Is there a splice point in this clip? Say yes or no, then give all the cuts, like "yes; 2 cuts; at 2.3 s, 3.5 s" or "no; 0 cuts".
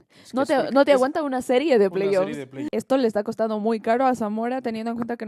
yes; 1 cut; at 2.6 s